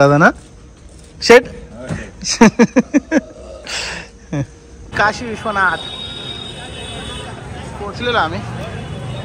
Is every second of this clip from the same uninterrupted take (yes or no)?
no